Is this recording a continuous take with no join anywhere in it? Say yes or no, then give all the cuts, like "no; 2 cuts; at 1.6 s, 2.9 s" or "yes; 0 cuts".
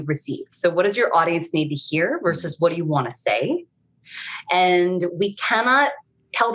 yes; 0 cuts